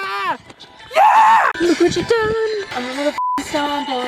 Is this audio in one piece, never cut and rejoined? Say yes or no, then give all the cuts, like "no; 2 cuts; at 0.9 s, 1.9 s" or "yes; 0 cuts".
yes; 0 cuts